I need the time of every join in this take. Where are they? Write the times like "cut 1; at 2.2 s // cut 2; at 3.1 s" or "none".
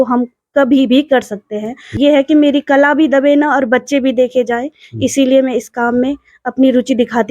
cut 1; at 1.8 s